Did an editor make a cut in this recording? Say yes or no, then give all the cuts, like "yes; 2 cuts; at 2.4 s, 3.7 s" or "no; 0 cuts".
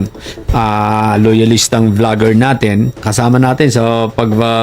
yes; 1 cut; at 3.0 s